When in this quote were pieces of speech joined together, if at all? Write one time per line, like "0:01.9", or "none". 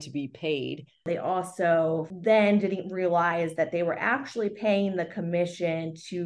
0:01.1
0:02.1